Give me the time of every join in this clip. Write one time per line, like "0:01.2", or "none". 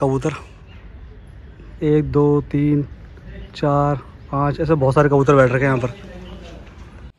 none